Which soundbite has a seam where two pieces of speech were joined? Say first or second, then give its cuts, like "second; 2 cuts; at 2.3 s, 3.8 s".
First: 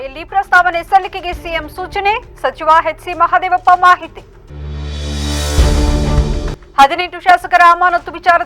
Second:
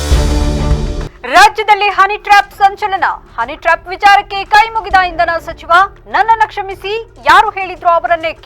second; 1 cut; at 1.1 s